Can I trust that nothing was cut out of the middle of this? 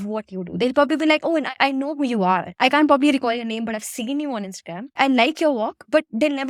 yes; 0 cuts

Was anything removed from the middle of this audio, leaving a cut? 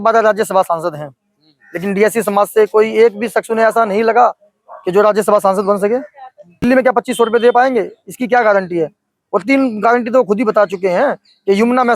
yes; 1 cut; at 6.6 s

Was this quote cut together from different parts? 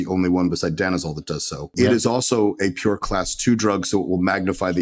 yes; 1 cut; at 1.7 s

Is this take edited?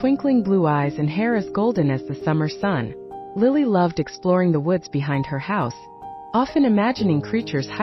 no; 0 cuts

